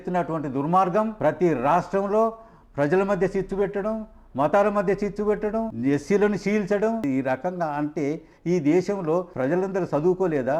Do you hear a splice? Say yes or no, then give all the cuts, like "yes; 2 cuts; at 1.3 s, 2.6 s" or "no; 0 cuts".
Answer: yes; 4 cuts; at 1.1 s, 5.7 s, 7.0 s, 9.3 s